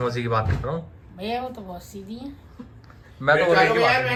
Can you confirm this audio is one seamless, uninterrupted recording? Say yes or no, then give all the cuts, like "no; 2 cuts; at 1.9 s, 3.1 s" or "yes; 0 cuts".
yes; 0 cuts